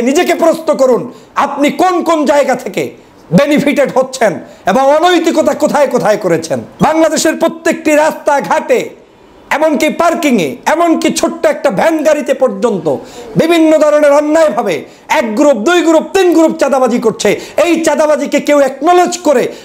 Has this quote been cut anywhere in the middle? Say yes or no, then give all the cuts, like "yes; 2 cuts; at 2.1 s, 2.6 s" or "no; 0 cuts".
yes; 1 cut; at 6.6 s